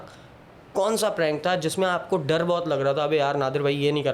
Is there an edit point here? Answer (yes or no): no